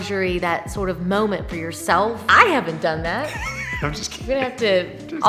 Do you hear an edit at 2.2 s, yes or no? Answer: yes